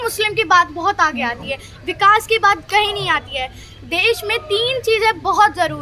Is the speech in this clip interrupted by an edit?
no; 0 cuts

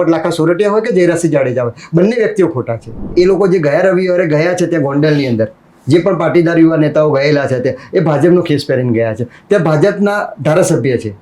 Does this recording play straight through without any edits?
no; 1 cut; at 3.1 s

